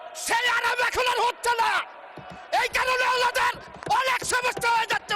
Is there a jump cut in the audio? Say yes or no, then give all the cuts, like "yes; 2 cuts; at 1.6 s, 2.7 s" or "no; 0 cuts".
no; 0 cuts